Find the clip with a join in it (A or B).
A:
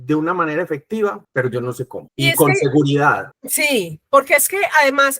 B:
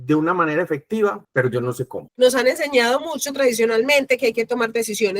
B